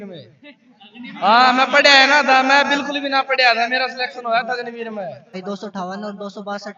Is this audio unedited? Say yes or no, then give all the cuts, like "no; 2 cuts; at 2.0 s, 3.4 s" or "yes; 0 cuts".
no; 1 cut; at 5.4 s